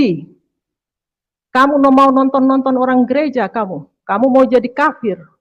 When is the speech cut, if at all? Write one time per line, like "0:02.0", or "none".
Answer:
none